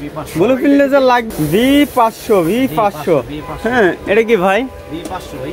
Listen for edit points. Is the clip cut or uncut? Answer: cut